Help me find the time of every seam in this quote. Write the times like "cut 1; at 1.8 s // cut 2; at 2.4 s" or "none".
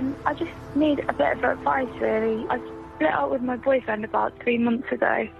cut 1; at 2.5 s